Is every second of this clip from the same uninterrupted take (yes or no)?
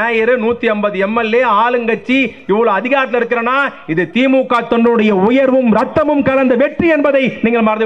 yes